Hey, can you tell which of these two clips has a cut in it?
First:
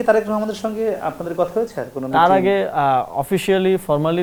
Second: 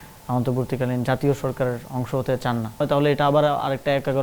second; 1 cut; at 2.8 s

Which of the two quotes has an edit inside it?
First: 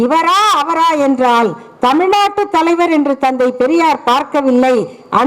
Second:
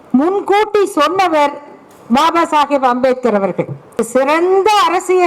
second; 1 cut; at 4.0 s

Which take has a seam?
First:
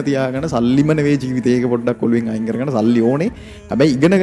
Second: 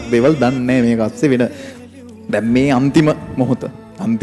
second; 1 cut; at 1.7 s

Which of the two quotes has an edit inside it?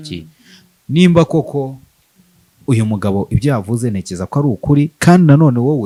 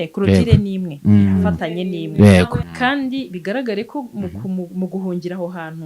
second; 1 cut; at 2.7 s

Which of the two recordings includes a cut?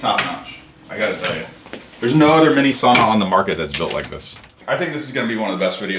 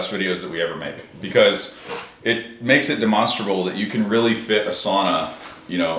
first; 1 cut; at 4.5 s

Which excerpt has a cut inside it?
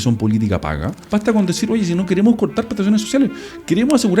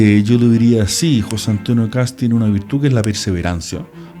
first; 1 cut; at 0.9 s

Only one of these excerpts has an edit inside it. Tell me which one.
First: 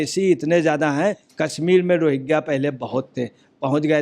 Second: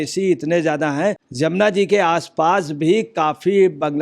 first; 1 cut; at 1.2 s

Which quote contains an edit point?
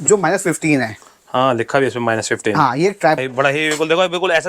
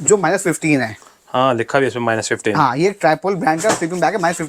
first; 1 cut; at 3.2 s

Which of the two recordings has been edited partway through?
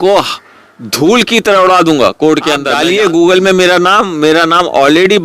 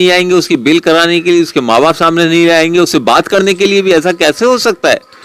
first; 1 cut; at 2.7 s

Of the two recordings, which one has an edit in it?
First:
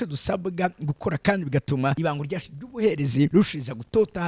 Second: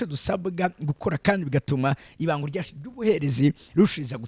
first; 2 cuts; at 2.0 s, 3.3 s

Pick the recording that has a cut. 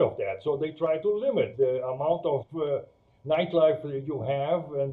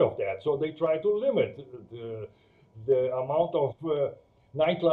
first; 1 cut; at 1.5 s

